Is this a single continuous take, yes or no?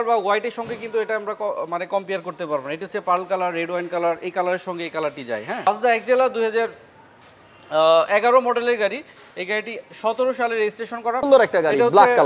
no